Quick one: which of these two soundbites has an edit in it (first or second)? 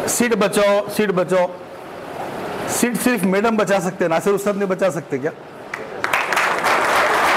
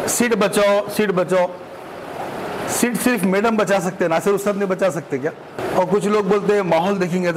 second